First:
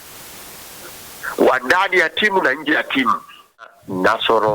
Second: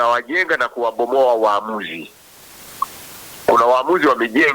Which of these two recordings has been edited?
first; 1 cut; at 3.6 s

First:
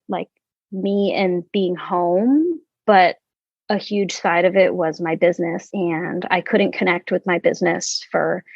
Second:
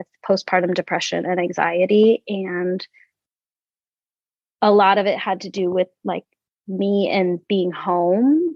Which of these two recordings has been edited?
first; 1 cut; at 5.6 s

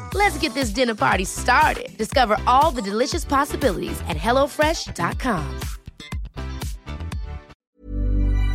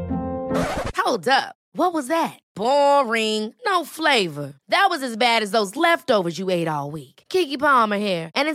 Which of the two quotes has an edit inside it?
first; 1 cut; at 7.5 s

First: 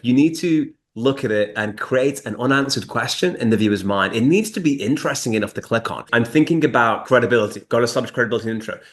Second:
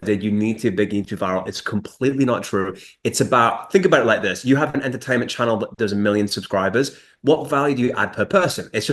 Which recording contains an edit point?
first; 2 cuts; at 6.0 s, 7.0 s

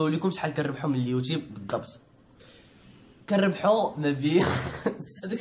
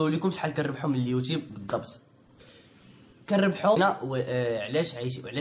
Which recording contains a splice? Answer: second; 1 cut; at 3.8 s

